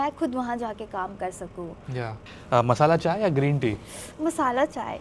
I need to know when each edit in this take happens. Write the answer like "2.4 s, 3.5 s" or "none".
2.2 s